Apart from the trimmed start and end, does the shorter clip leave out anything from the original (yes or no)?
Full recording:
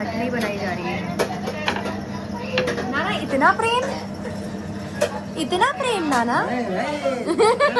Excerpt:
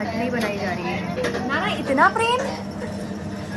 yes